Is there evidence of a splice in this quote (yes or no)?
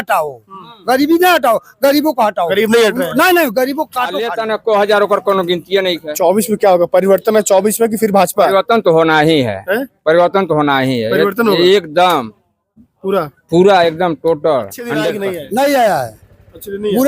yes